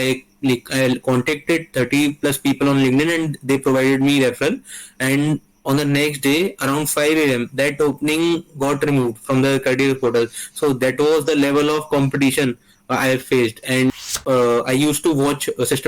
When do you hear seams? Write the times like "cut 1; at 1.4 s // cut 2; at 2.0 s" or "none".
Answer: cut 1; at 14.0 s